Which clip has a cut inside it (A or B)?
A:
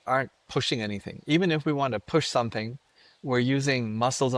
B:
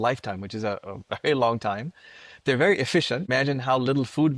B